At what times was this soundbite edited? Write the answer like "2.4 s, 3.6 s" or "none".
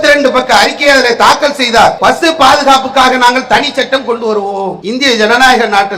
2.0 s, 4.8 s

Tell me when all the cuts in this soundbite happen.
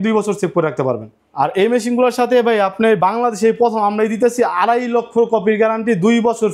1.2 s

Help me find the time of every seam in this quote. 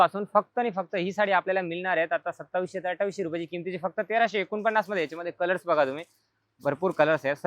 none

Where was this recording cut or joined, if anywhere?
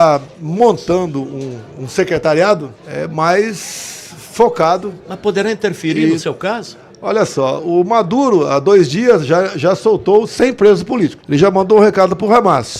2.8 s, 11.2 s

